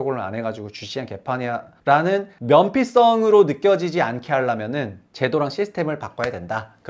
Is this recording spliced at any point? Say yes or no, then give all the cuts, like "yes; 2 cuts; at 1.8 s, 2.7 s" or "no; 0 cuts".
yes; 3 cuts; at 1.7 s, 2.3 s, 5.0 s